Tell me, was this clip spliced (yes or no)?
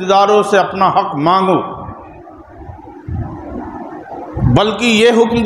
no